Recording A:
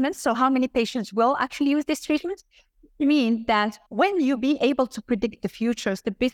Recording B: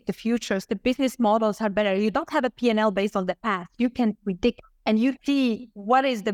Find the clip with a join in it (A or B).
B